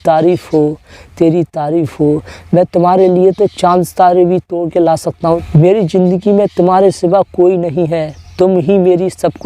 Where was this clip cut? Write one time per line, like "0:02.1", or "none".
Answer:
0:05.4